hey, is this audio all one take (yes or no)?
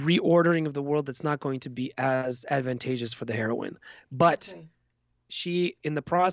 yes